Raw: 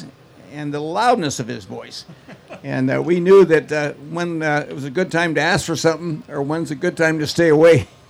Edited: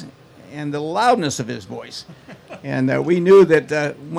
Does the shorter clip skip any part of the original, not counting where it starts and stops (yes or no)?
no